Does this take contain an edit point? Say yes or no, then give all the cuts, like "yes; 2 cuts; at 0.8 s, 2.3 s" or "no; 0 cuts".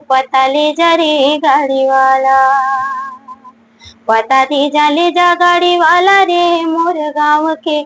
no; 0 cuts